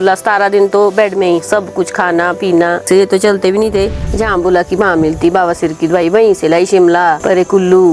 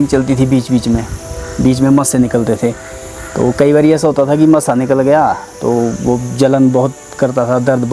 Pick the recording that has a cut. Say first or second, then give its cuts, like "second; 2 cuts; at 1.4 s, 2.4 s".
first; 1 cut; at 4.1 s